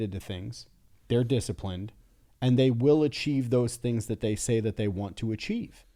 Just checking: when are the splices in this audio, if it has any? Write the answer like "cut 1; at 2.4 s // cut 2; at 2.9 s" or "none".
none